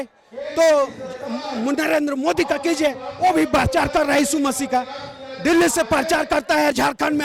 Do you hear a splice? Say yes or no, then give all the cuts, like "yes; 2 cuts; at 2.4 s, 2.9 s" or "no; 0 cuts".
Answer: no; 0 cuts